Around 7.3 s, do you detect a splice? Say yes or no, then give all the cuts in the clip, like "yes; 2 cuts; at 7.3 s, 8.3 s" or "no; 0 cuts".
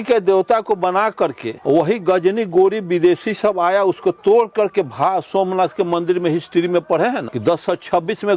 yes; 2 cuts; at 1.5 s, 7.3 s